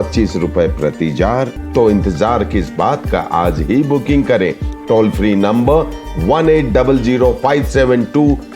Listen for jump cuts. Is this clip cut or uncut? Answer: cut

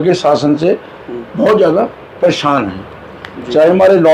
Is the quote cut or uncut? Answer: uncut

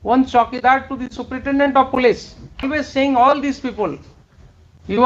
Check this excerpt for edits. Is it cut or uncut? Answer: cut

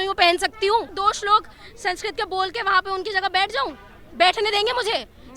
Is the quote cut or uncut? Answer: cut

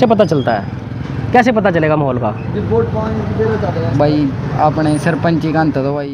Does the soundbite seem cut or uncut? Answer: uncut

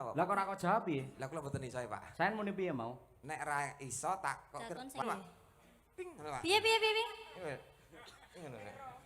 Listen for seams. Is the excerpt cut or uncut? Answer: cut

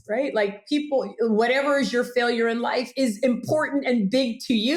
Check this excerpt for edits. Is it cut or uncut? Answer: uncut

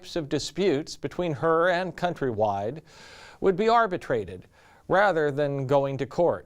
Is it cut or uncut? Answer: cut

